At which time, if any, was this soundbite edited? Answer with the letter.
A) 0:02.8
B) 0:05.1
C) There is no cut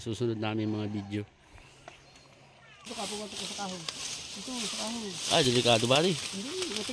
A